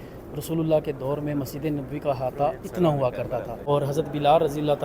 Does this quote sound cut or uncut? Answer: cut